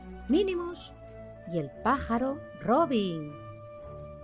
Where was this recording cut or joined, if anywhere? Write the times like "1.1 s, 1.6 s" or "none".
3.3 s